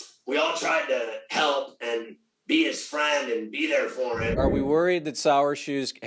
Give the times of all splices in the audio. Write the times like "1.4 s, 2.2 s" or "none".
4.4 s